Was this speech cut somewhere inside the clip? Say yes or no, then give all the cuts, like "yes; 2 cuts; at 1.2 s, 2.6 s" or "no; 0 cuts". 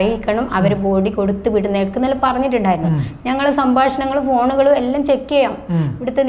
no; 0 cuts